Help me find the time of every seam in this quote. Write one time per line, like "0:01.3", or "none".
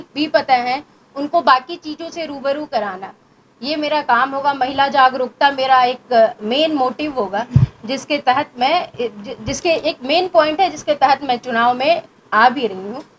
none